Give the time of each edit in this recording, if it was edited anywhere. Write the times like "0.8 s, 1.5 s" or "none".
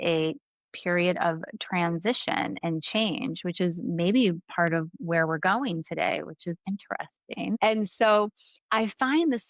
7.6 s